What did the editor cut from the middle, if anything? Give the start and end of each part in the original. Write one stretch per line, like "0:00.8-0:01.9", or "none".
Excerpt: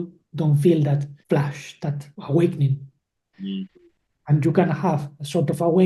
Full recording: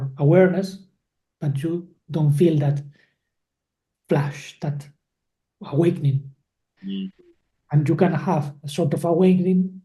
0:02.9-0:03.9
0:04.9-0:05.5